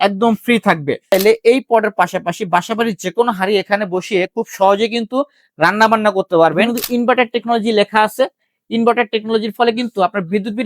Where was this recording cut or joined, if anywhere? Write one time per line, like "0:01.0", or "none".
0:01.1
0:06.7